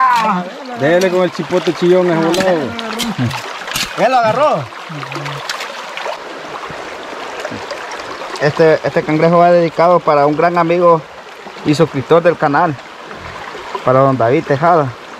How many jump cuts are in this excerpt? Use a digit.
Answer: 1